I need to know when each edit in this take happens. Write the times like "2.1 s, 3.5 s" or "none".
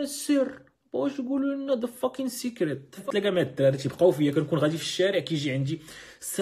2.9 s